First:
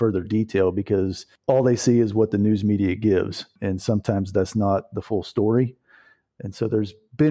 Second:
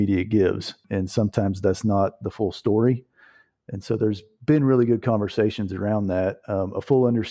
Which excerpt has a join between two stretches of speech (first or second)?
first